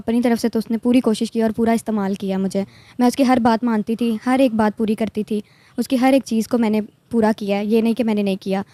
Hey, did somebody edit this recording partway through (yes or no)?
no